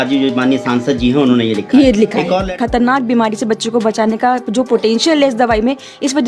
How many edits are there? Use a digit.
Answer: 1